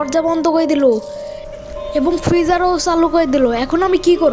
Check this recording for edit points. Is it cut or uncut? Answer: uncut